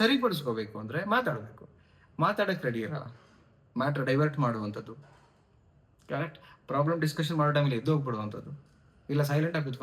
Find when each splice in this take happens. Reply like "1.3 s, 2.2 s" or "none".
none